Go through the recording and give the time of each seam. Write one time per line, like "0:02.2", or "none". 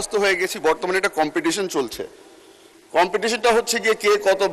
none